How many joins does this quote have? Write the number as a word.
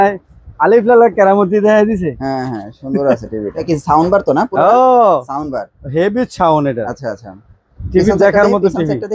one